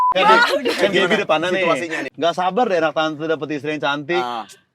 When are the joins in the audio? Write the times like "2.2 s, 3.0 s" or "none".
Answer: 2.0 s